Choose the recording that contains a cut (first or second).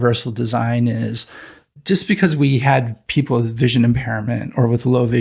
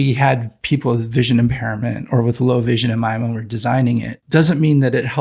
second